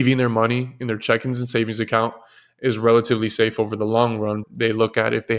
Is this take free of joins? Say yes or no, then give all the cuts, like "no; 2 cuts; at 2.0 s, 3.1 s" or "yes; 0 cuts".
no; 1 cut; at 4.5 s